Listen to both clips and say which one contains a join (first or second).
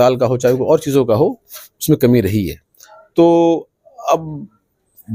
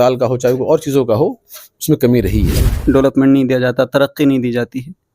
second